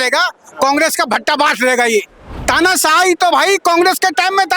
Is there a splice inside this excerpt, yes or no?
yes